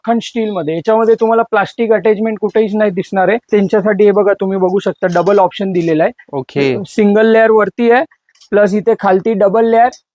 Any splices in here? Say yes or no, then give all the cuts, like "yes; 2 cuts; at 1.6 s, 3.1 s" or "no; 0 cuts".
yes; 1 cut; at 3.5 s